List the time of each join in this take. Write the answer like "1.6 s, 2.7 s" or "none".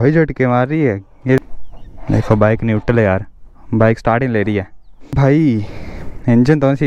1.4 s, 5.1 s